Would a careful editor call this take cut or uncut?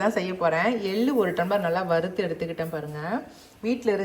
uncut